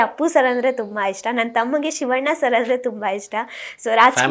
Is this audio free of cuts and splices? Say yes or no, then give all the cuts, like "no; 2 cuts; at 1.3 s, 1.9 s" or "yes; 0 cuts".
yes; 0 cuts